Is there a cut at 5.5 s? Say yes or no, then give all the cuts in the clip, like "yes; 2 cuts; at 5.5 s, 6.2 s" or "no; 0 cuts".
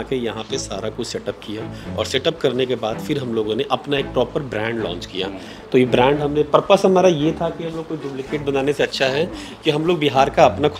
no; 0 cuts